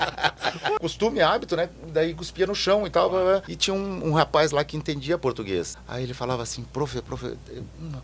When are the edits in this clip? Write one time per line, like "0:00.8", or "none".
0:00.8
0:03.5
0:05.8